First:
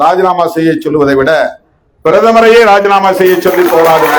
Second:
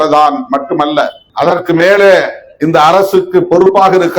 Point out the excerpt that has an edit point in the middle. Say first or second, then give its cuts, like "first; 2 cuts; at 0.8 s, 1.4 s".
second; 1 cut; at 1.2 s